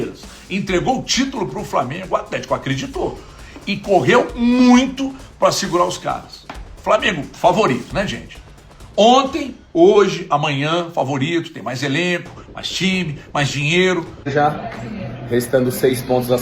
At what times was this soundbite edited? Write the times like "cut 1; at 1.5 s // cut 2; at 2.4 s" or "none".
cut 1; at 14.3 s